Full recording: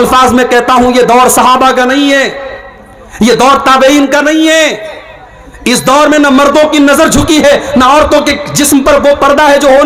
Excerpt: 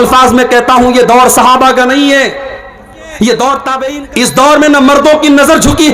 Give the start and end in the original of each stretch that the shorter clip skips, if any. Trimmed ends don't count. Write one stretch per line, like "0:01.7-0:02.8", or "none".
0:03.8-0:05.3